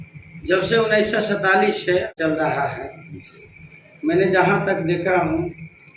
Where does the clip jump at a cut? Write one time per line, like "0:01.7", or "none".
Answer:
0:02.1